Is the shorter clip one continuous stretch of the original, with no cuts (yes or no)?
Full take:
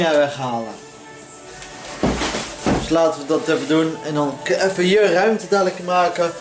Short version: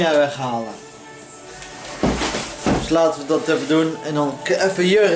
yes